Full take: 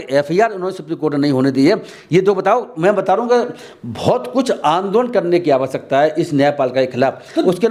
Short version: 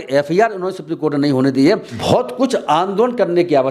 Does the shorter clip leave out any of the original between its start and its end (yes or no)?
yes